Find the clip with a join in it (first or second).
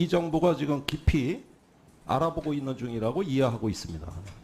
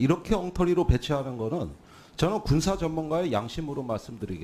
first